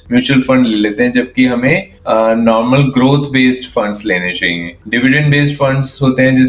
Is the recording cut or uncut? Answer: uncut